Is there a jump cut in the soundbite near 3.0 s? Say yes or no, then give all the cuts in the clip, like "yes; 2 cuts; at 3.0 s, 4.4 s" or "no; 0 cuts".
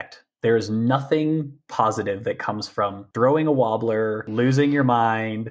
yes; 2 cuts; at 3.0 s, 4.2 s